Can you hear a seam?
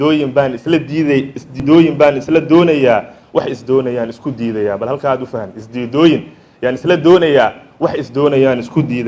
yes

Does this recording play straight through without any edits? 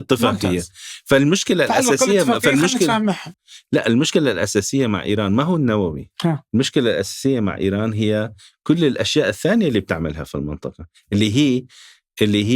yes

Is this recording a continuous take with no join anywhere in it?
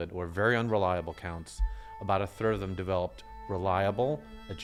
yes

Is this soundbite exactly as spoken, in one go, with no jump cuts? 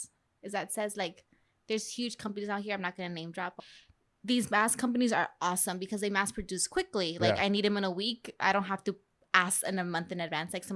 no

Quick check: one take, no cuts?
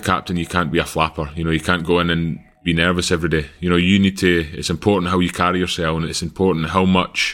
yes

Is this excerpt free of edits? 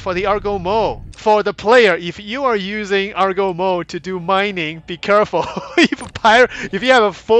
no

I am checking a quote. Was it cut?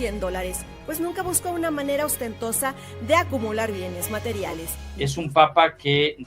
yes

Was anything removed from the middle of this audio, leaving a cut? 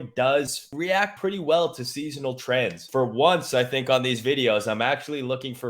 yes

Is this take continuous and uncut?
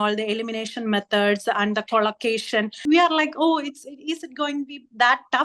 no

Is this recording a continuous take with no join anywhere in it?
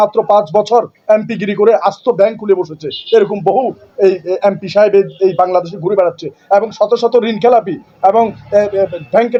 yes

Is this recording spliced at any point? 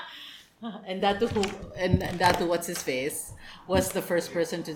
no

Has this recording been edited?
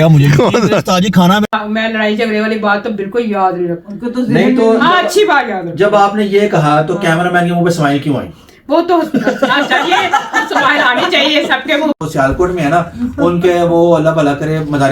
yes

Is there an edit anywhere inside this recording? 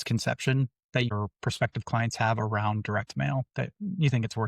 yes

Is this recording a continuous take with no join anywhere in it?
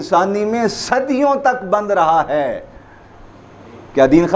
yes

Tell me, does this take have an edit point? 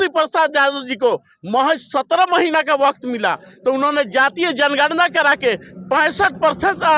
no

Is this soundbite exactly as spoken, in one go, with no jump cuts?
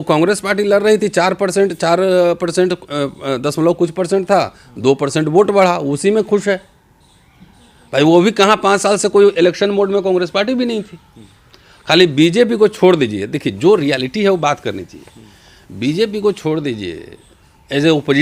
yes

